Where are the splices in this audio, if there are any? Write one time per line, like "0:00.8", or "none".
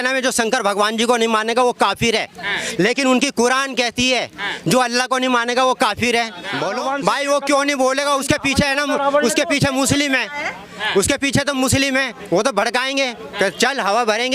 0:06.7